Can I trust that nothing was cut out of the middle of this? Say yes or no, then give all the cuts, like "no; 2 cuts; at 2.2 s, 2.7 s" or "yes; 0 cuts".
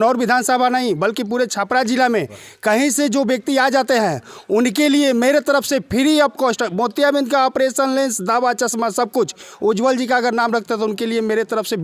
yes; 0 cuts